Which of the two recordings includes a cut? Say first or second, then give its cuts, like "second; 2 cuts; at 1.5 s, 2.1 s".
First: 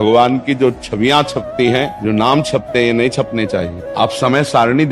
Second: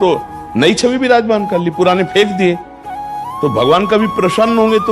first; 2 cuts; at 1.9 s, 3.8 s